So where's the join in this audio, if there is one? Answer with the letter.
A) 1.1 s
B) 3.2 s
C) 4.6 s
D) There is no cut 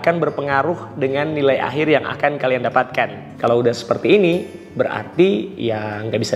B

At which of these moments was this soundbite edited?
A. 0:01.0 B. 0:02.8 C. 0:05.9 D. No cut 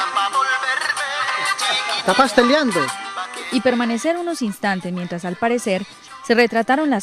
D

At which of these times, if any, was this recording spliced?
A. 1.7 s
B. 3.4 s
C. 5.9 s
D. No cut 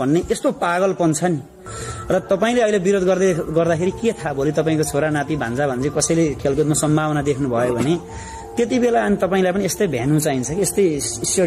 A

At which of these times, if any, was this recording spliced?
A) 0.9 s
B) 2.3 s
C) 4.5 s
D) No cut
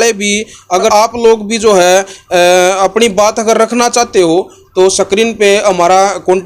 A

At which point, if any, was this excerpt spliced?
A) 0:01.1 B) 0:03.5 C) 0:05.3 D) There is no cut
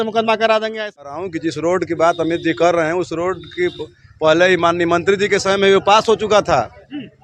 A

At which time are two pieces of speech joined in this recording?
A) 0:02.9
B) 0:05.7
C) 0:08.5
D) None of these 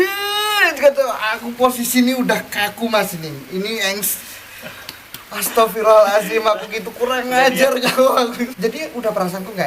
C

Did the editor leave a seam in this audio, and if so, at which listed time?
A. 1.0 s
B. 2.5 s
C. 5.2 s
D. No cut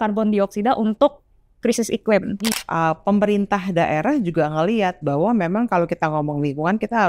B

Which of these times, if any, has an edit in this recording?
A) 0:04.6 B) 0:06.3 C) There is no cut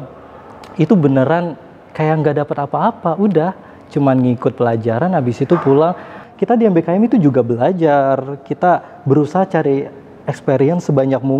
B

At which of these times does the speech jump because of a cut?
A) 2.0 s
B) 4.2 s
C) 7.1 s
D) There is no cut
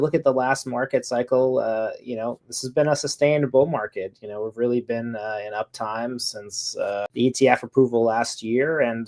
C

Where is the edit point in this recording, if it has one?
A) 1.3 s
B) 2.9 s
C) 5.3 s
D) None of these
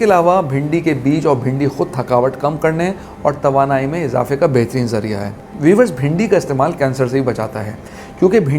C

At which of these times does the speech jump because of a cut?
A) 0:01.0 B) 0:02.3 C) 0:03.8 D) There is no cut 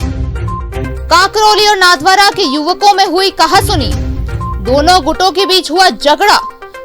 A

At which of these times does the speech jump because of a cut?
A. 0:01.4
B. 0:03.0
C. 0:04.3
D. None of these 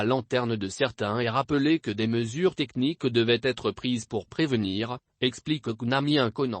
C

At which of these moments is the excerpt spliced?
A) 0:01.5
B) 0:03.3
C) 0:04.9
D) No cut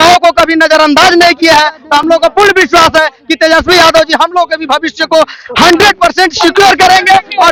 D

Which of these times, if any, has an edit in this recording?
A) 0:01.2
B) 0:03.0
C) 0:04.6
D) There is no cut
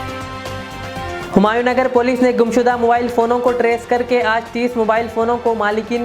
A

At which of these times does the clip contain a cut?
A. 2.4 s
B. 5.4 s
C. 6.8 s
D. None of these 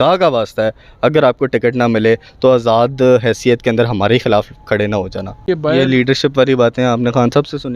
B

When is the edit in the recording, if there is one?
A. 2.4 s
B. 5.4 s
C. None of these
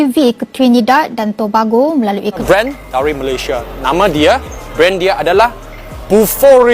A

